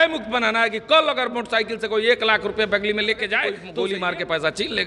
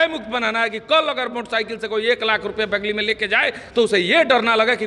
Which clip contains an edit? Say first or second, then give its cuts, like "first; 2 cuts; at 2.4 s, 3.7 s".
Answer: first; 1 cut; at 3.6 s